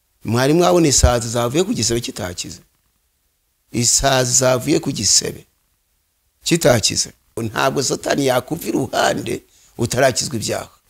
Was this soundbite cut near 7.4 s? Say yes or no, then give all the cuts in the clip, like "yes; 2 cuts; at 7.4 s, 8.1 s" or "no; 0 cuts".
yes; 1 cut; at 7.4 s